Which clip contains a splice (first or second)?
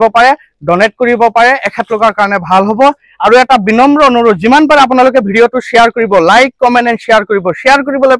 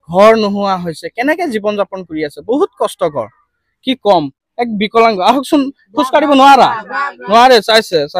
second